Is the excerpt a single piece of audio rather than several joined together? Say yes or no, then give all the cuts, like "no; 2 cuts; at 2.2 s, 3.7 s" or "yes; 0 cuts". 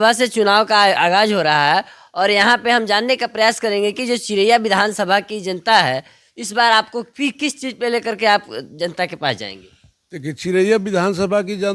yes; 0 cuts